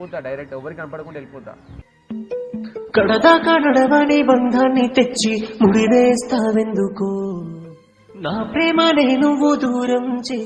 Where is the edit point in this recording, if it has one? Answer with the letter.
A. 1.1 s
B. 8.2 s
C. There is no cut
C